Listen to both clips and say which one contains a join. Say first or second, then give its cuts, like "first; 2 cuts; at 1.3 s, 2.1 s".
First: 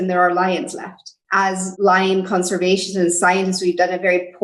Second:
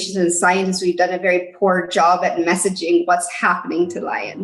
first; 1 cut; at 1.3 s